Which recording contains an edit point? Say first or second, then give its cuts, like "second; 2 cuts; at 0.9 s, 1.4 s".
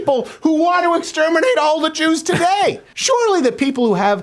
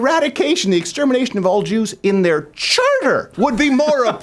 first; 1 cut; at 2.9 s